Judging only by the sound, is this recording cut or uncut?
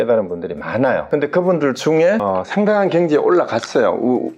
cut